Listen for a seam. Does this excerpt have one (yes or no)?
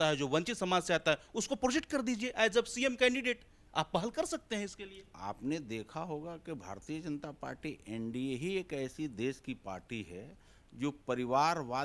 no